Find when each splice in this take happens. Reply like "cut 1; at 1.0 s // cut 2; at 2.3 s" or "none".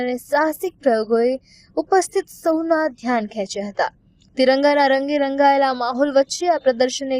cut 1; at 5.9 s